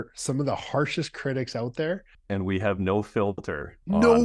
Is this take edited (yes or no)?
yes